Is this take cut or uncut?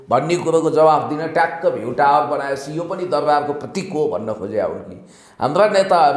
uncut